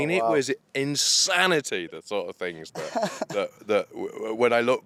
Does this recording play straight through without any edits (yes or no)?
yes